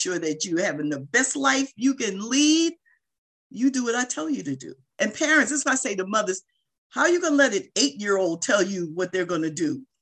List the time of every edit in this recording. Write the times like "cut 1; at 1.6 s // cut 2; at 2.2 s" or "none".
cut 1; at 4.8 s